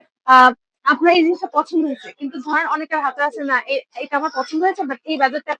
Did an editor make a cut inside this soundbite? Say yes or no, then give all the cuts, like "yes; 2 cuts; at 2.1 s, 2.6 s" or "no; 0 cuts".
no; 0 cuts